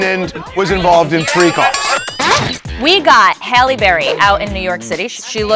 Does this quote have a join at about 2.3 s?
yes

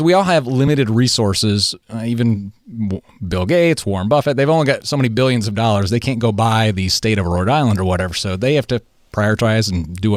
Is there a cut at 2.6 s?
no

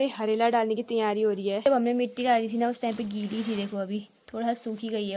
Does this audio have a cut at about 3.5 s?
no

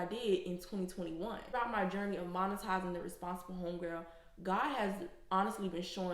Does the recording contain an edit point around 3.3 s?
no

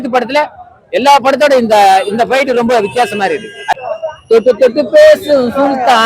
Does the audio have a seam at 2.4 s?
no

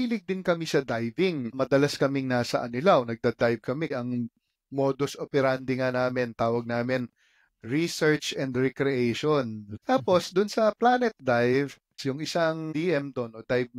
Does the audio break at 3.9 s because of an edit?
yes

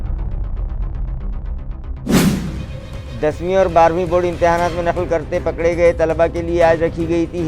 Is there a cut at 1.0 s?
no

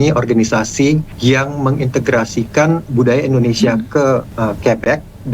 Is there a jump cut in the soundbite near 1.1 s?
yes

